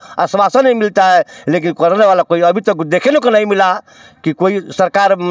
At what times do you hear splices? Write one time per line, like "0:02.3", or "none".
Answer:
none